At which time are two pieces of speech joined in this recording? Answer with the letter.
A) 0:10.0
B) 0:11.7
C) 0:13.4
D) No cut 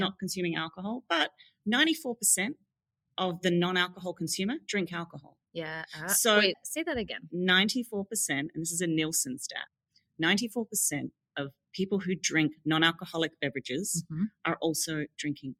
D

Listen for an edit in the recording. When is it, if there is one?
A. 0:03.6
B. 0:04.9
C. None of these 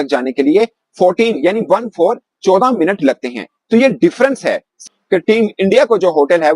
B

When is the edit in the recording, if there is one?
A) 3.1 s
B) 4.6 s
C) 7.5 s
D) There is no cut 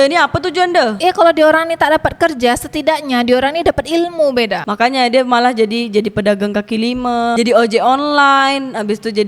B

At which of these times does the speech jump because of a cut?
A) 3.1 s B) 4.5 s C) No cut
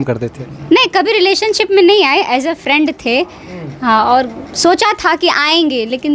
C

